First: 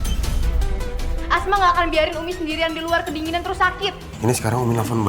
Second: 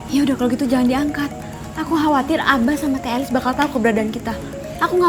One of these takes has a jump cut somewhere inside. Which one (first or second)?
first